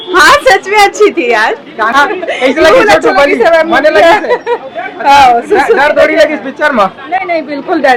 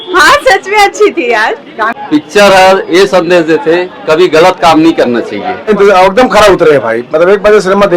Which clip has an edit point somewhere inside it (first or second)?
second